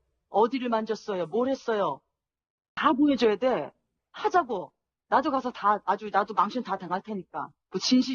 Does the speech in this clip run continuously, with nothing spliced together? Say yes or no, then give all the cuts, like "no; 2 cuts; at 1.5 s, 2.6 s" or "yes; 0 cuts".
no; 1 cut; at 3.7 s